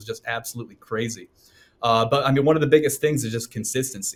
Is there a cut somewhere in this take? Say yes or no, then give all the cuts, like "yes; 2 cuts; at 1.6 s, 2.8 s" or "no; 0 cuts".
no; 0 cuts